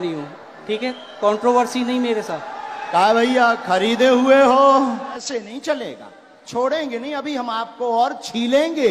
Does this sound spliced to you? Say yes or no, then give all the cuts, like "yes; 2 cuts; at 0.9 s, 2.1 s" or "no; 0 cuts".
yes; 1 cut; at 5.2 s